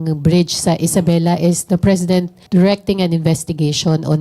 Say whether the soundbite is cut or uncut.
cut